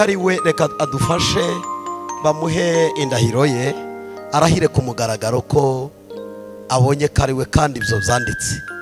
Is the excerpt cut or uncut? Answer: uncut